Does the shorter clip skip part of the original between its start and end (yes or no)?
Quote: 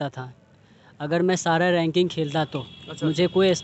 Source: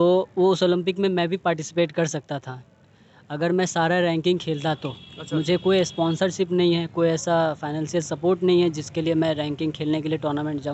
no